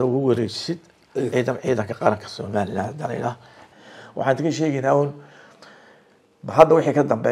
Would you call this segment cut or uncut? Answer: cut